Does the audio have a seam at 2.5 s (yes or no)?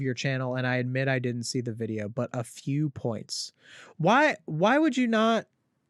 no